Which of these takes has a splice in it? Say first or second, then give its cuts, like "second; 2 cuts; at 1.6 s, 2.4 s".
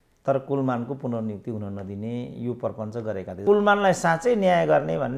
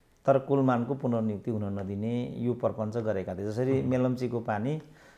first; 1 cut; at 3.4 s